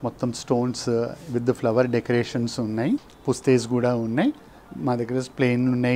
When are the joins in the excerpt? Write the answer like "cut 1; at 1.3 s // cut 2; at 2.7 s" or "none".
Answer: cut 1; at 3.1 s